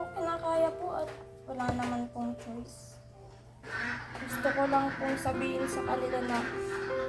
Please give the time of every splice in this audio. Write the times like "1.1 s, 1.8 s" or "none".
3.6 s